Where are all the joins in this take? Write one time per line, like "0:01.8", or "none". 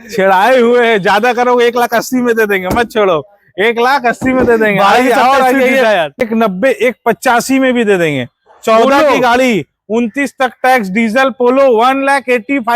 0:06.2